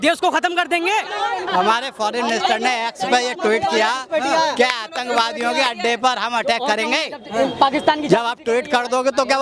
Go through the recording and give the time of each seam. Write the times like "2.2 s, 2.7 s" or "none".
1.3 s